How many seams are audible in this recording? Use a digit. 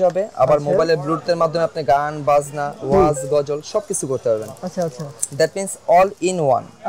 0